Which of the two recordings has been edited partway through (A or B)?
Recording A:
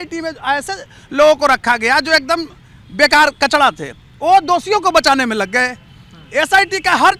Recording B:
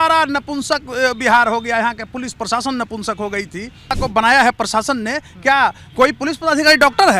B